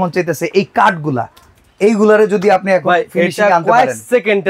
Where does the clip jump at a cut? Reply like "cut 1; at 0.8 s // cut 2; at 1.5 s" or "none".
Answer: none